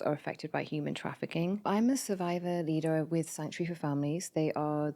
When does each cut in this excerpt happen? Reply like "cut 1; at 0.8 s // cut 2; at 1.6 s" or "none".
cut 1; at 1.6 s